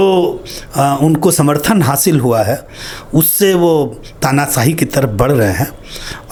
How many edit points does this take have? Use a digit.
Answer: 0